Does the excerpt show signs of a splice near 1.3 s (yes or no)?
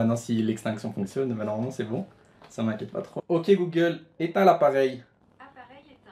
no